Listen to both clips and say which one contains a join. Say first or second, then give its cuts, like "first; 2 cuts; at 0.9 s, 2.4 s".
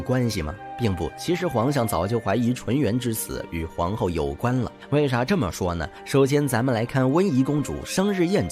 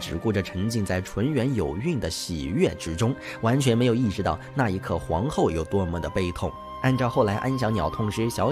first; 2 cuts; at 4.8 s, 5.9 s